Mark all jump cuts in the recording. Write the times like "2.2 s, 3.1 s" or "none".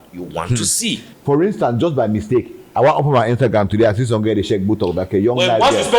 1.1 s

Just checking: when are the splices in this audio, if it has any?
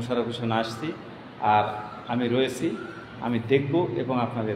none

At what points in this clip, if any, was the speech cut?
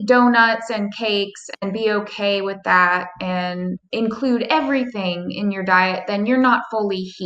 none

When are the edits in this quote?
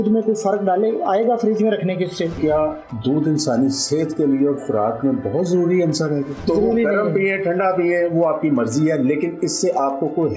2.4 s, 6.3 s

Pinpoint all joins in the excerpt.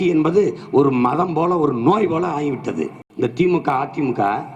3.0 s

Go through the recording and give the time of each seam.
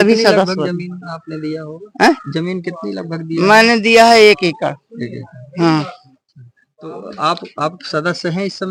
none

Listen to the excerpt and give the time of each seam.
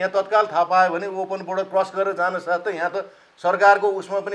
none

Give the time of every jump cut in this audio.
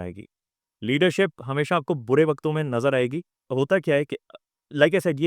3.4 s

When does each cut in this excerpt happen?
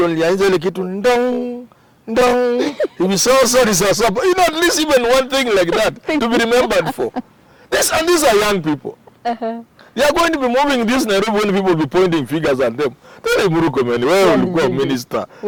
none

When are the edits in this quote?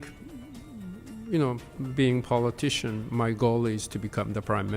1.7 s

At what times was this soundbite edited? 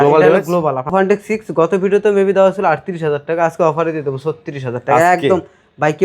0.9 s

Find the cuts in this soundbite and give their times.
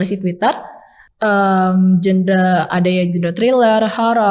none

